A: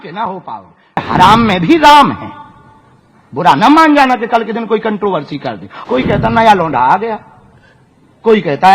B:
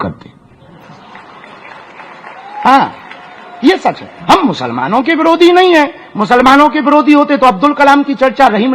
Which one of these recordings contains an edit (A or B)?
A